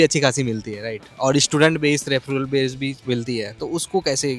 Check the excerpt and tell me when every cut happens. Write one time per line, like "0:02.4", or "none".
none